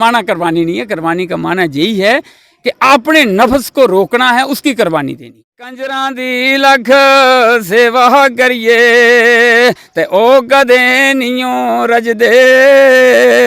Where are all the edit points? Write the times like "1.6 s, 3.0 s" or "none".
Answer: 5.9 s